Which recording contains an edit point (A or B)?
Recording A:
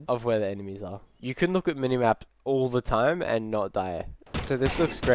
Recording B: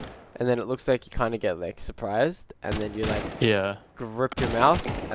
A